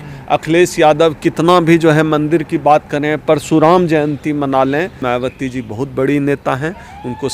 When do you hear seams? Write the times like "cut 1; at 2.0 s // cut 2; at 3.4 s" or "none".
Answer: cut 1; at 5.0 s